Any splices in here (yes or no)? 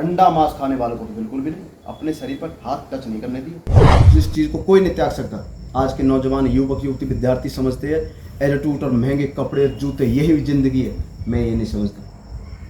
yes